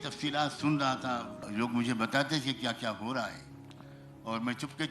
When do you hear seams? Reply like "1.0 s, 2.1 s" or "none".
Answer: 1.3 s

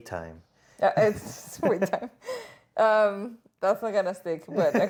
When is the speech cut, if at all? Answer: none

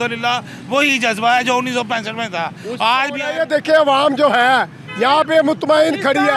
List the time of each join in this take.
3.2 s

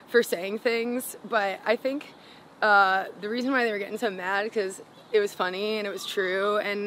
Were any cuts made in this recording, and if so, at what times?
none

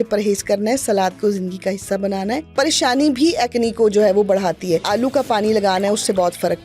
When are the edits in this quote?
2.5 s, 4.8 s

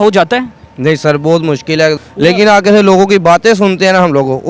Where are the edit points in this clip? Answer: 2.0 s

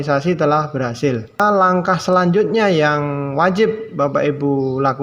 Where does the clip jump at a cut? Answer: 1.4 s

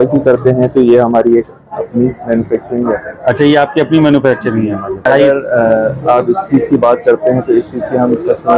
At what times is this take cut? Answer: 5.0 s

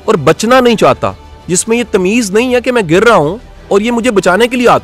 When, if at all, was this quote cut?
1.3 s

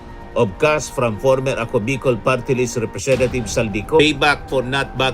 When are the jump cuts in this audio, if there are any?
4.0 s

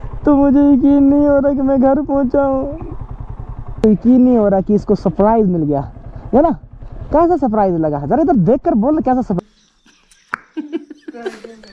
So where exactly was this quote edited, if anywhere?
3.8 s, 9.4 s

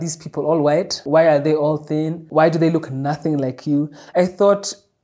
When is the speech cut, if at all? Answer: 1.0 s, 2.2 s, 4.0 s

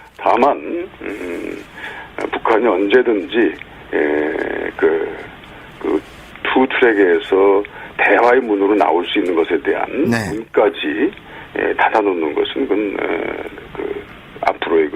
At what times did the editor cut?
1.0 s

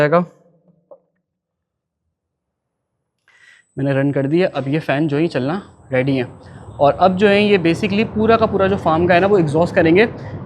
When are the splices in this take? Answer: none

